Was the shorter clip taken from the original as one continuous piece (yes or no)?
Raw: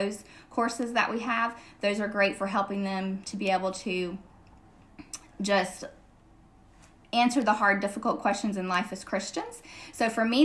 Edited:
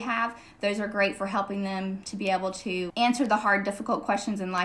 no